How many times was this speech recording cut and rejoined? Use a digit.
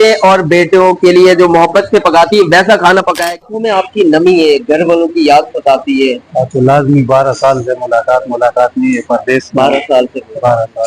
1